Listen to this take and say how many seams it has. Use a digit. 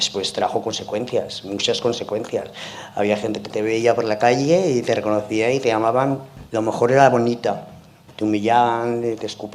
1